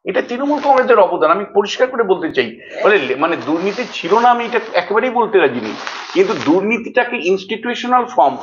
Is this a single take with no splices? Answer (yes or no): yes